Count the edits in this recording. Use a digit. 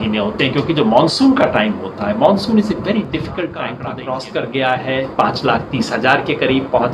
1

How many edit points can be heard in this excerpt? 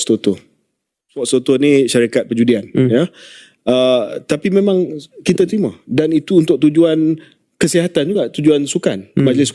1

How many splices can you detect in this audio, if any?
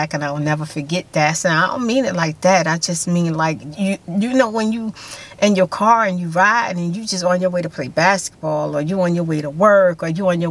0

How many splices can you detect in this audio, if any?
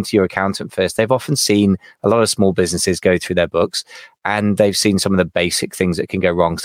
1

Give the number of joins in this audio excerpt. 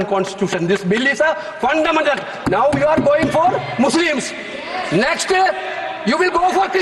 0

